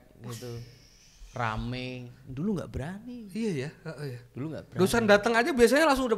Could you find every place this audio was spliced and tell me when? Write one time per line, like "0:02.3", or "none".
none